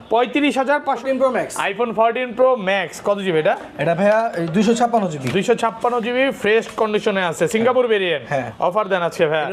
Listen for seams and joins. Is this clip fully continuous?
no; 1 cut; at 1.0 s

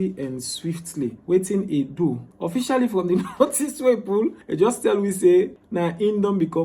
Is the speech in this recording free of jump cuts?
no; 4 cuts; at 1.2 s, 2.3 s, 4.4 s, 5.6 s

